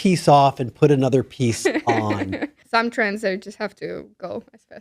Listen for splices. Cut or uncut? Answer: cut